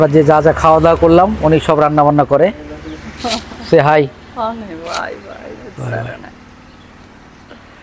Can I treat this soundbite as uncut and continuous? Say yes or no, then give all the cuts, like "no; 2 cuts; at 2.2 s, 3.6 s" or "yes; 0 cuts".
yes; 0 cuts